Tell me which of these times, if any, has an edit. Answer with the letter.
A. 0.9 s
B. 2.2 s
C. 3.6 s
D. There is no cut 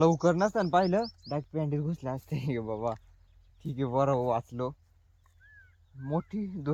D